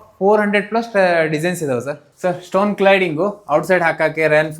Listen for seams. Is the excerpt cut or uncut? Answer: cut